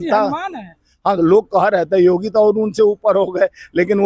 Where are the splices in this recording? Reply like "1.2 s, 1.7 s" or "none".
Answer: none